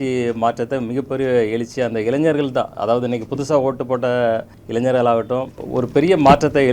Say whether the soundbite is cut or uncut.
cut